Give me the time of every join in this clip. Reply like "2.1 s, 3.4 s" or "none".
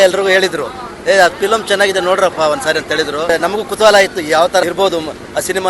3.3 s, 4.6 s